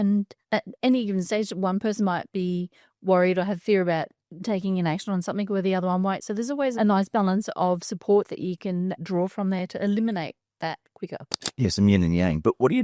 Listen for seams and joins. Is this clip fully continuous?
yes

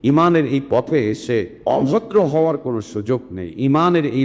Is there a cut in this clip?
yes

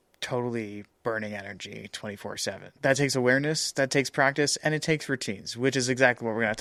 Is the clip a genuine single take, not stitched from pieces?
yes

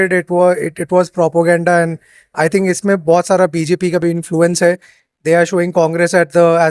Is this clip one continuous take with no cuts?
yes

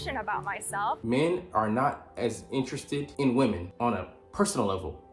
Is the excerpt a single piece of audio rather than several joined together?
no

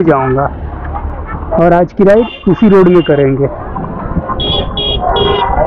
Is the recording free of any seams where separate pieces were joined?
yes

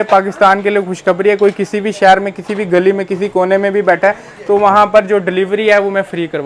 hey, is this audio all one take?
yes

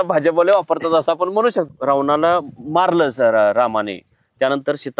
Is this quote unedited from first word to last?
no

